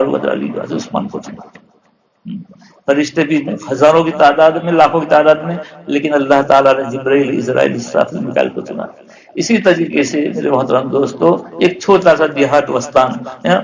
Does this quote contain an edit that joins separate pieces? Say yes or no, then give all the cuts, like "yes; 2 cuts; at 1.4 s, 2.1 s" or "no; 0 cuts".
no; 0 cuts